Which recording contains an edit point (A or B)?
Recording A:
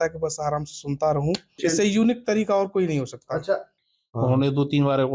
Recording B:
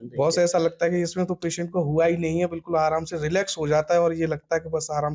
A